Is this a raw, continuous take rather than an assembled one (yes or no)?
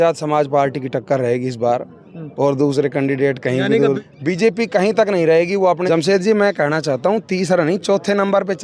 no